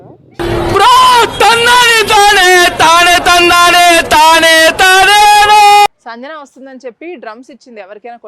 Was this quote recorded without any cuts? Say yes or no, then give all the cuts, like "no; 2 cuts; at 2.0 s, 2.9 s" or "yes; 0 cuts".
no; 1 cut; at 6.0 s